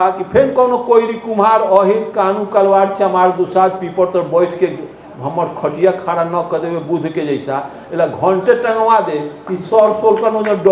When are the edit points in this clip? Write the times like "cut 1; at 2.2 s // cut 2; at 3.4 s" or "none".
none